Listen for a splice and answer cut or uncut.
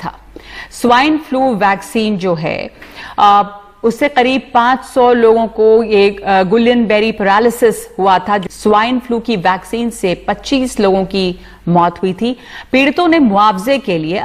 cut